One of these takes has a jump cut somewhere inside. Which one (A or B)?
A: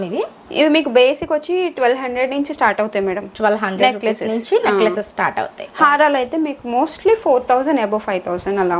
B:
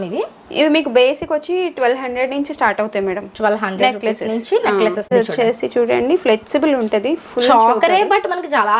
B